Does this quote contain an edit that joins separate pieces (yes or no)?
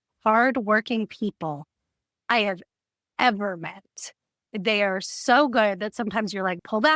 no